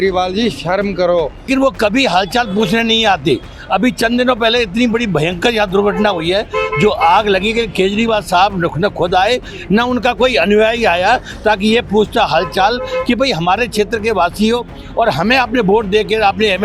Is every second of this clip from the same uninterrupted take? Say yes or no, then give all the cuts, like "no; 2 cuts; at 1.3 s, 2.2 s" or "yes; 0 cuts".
no; 1 cut; at 1.5 s